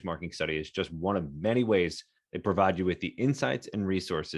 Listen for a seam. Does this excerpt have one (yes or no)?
no